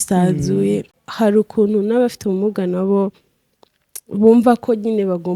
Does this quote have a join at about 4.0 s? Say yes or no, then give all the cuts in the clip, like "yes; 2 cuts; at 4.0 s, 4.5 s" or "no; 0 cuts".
no; 1 cut; at 1.0 s